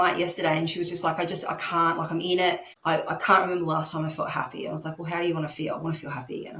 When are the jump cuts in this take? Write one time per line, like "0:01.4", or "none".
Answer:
0:02.7